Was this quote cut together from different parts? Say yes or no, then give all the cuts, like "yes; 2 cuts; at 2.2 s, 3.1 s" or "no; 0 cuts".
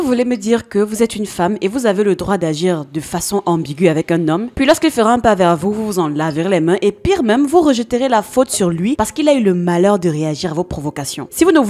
no; 0 cuts